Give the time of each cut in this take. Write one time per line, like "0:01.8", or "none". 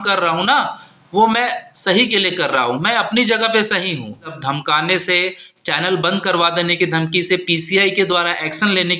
0:04.4